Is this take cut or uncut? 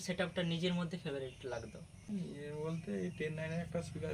cut